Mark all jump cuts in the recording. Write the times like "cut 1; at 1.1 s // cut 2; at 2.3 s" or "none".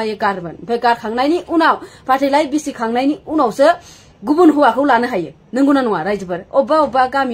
none